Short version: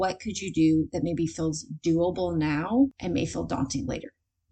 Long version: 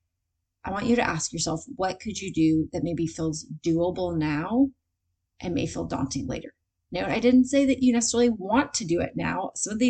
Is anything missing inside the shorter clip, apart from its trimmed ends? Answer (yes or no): yes